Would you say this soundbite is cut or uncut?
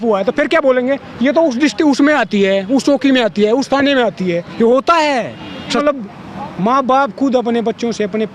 cut